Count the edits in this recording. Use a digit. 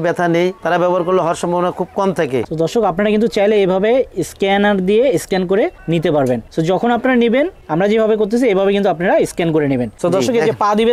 5